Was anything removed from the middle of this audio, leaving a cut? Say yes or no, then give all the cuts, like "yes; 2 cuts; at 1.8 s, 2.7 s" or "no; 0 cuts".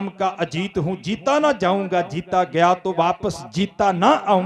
no; 0 cuts